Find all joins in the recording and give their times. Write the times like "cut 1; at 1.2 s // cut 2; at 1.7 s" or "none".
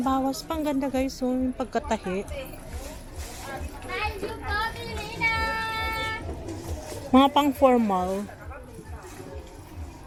none